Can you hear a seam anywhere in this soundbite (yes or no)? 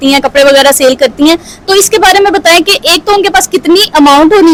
no